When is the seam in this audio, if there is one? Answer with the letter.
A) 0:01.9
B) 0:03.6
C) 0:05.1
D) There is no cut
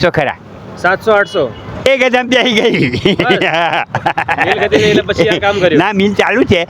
A